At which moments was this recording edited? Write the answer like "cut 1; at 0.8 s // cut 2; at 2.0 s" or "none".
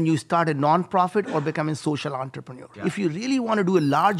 cut 1; at 2.8 s